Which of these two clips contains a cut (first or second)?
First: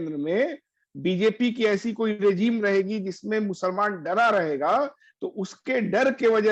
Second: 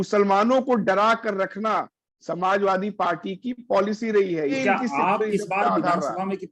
second